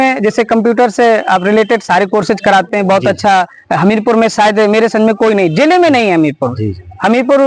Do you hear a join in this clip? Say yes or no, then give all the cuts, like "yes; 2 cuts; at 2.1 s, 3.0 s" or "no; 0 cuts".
no; 0 cuts